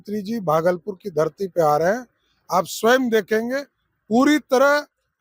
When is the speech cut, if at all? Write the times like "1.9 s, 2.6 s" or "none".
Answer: none

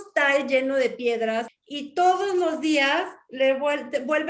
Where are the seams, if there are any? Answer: 1.5 s

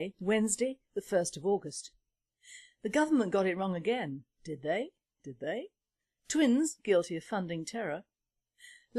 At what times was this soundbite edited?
7.5 s

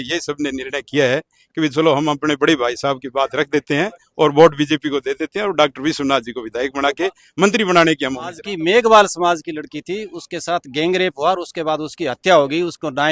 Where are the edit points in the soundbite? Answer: 8.5 s

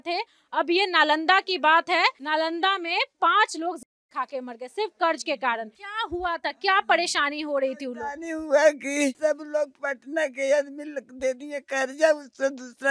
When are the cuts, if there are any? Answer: 2.2 s, 5.8 s

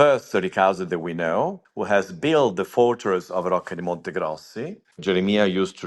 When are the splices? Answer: 1.7 s, 5.0 s

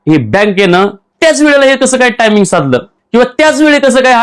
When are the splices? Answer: 1.0 s, 2.9 s

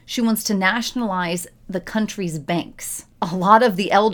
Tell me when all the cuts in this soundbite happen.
3.1 s

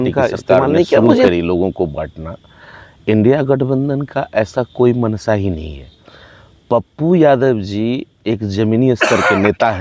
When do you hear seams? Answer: 1.3 s

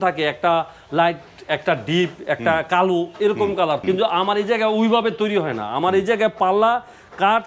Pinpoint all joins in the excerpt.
3.8 s

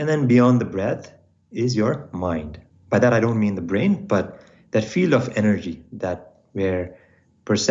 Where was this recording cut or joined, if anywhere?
none

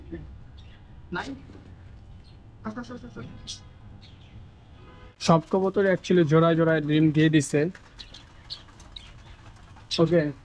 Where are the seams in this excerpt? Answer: 5.2 s

